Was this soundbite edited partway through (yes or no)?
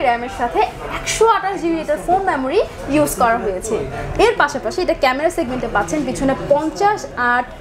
no